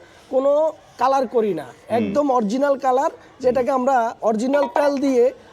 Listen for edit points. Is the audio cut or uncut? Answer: uncut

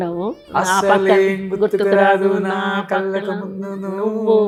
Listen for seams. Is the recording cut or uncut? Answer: uncut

